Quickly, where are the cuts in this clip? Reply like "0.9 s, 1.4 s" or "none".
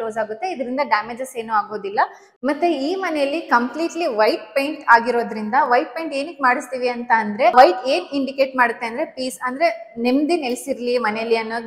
2.2 s, 7.5 s